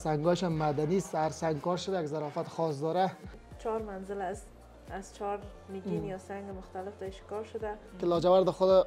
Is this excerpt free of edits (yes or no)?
no